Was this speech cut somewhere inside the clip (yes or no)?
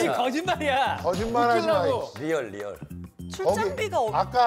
no